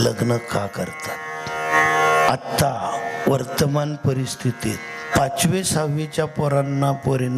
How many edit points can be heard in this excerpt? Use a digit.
2